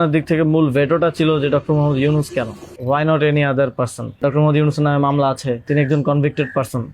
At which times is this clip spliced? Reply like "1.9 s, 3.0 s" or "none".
2.6 s, 4.2 s, 5.6 s